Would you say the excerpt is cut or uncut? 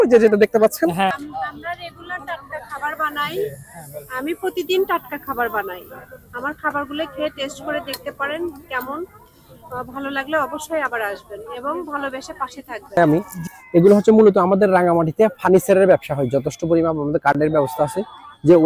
cut